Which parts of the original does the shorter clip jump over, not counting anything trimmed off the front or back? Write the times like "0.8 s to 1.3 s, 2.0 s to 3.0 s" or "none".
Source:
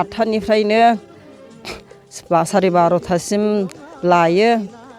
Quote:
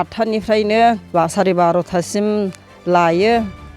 1.0 s to 2.2 s